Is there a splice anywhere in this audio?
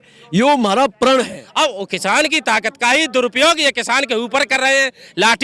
yes; 1 cut; at 1.4 s

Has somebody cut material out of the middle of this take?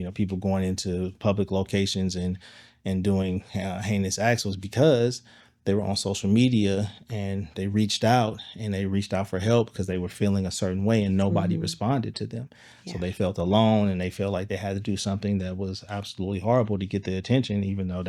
no; 0 cuts

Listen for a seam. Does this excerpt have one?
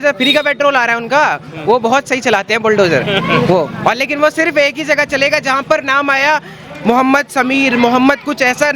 no; 0 cuts

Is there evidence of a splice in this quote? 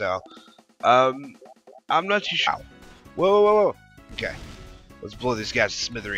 no; 0 cuts

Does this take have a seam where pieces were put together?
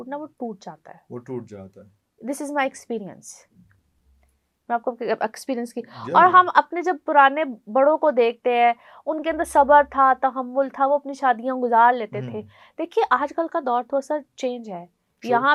no; 0 cuts

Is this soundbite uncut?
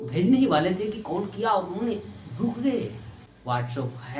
no; 1 cut; at 2.7 s

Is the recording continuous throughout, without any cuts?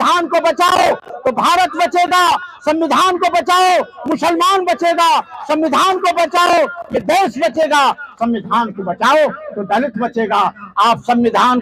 yes; 0 cuts

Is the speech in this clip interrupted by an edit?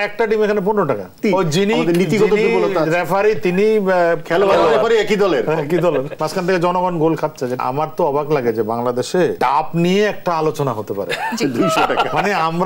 yes; 4 cuts; at 1.2 s, 6.1 s, 7.6 s, 9.4 s

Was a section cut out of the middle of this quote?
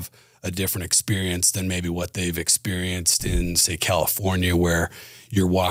no; 0 cuts

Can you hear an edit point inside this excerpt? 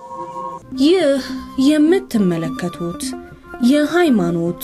no; 0 cuts

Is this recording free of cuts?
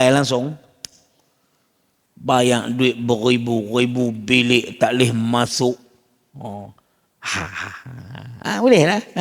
yes; 0 cuts

